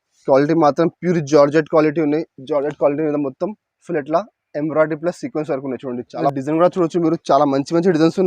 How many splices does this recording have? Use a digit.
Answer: 1